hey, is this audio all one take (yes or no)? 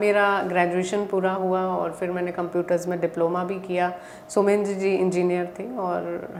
yes